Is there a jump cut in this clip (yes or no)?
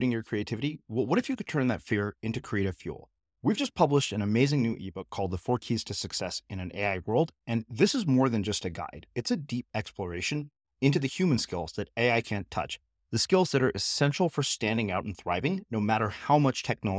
no